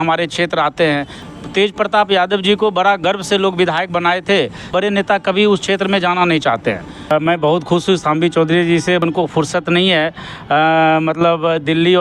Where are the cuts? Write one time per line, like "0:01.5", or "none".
0:01.1
0:04.7
0:07.1
0:09.0